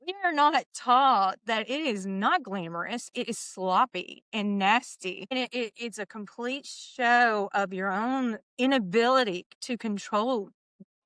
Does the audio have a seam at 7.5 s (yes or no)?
no